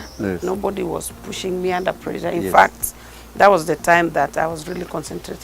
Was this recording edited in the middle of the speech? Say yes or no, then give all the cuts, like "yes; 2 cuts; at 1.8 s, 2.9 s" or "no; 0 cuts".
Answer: no; 0 cuts